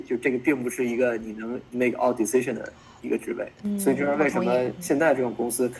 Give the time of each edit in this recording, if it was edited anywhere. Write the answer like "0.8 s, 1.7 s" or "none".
1.6 s, 3.6 s, 4.8 s